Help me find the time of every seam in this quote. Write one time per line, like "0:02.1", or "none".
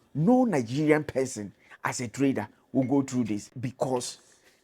0:03.6

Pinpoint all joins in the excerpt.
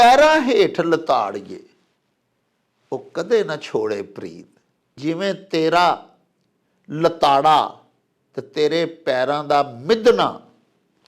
0:05.0

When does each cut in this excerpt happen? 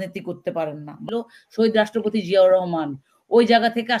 0:01.0

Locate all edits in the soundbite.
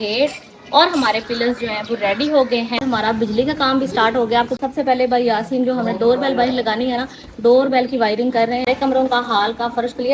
0:02.8
0:04.6
0:09.0

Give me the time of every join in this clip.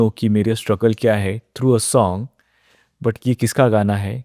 none

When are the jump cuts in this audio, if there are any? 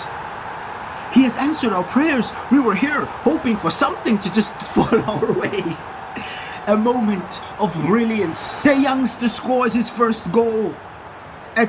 0:08.5

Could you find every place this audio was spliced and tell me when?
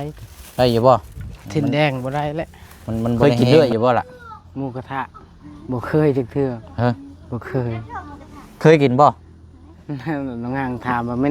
0:03.2

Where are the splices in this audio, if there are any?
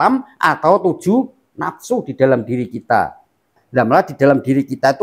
0:03.6

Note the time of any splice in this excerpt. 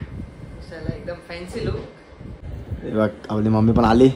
0:02.5

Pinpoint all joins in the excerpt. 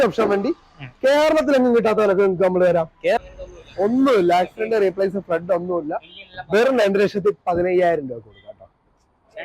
0:03.2

